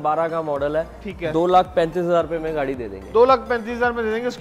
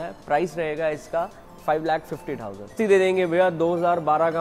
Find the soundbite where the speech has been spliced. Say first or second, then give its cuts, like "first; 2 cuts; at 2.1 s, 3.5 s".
second; 1 cut; at 2.7 s